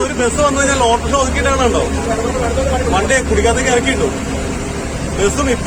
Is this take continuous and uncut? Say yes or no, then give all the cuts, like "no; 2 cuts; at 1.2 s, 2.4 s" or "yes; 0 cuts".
yes; 0 cuts